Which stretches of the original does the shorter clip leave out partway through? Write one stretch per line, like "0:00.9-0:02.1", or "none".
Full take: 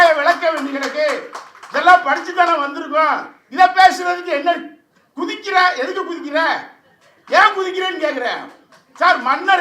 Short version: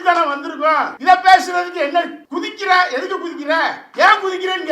0:03.2-0:03.4
0:04.7-0:05.1
0:06.7-0:07.2